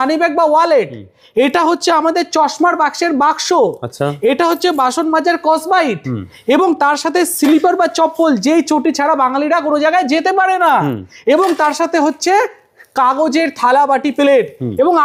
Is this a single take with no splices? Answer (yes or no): yes